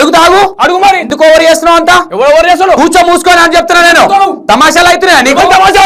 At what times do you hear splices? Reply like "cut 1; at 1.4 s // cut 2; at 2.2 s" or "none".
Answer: none